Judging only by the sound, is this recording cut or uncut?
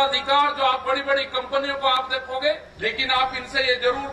cut